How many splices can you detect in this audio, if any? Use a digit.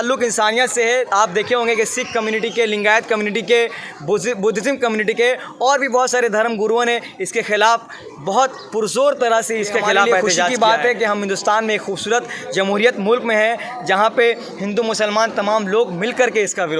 1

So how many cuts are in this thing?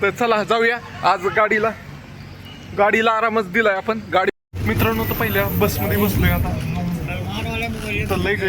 1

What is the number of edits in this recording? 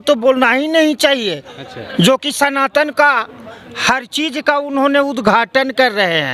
0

